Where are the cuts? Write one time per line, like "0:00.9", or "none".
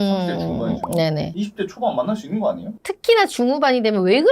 0:02.7